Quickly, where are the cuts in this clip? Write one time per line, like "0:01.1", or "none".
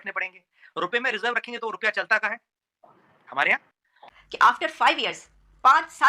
0:04.0